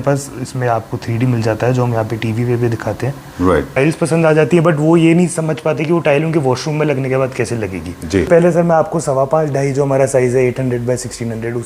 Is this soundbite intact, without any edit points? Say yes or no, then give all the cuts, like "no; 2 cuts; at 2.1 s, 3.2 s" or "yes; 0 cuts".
no; 2 cuts; at 3.8 s, 8.3 s